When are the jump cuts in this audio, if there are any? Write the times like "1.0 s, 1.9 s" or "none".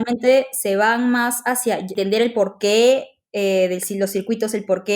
1.9 s